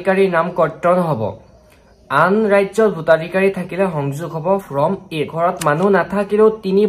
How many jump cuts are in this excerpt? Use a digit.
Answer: 1